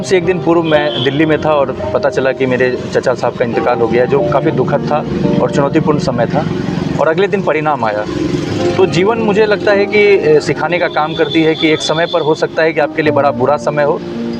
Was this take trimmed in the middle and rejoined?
no; 0 cuts

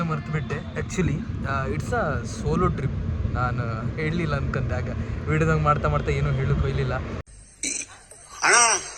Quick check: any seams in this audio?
no; 0 cuts

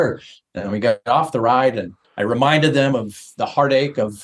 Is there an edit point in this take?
yes; 1 cut; at 1.0 s

